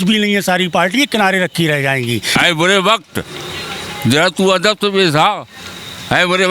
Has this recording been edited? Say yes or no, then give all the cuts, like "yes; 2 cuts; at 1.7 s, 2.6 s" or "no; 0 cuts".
yes; 1 cut; at 2.3 s